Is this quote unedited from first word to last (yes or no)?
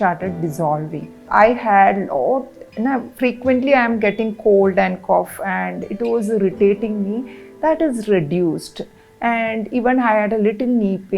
no